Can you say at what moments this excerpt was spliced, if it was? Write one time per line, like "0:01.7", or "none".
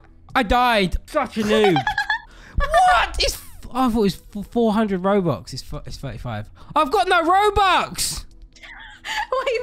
0:01.0